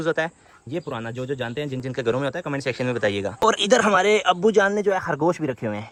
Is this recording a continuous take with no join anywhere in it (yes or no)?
yes